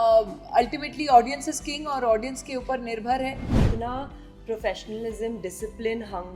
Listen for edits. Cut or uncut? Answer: cut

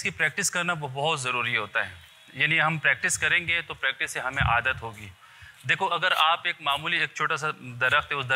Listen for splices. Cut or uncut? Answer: uncut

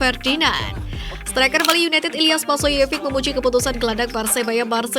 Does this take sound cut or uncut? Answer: uncut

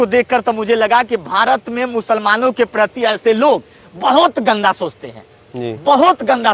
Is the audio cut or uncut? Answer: uncut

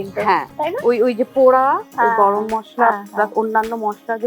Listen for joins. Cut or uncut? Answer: uncut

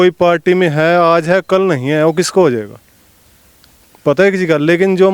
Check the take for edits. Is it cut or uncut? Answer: uncut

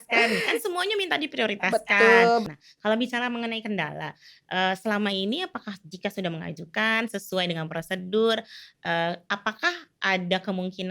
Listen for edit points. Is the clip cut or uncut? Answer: cut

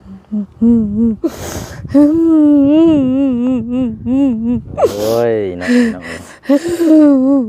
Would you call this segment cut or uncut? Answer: uncut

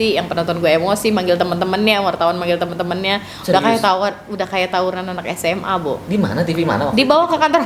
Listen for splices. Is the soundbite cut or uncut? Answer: uncut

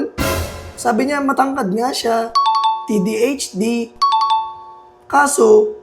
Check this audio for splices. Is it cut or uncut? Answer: uncut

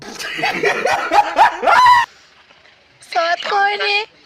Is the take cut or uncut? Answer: uncut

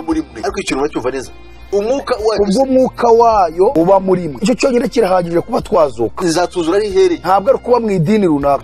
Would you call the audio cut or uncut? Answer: uncut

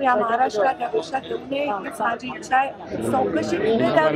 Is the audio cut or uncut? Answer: cut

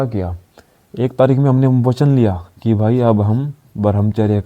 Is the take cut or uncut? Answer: uncut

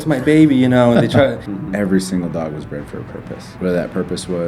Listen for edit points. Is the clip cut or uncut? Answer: cut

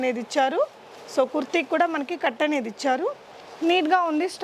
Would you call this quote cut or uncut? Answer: uncut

